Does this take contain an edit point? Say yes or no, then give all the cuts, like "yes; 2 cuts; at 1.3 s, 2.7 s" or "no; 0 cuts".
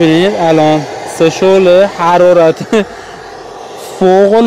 no; 0 cuts